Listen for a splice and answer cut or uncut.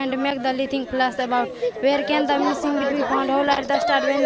uncut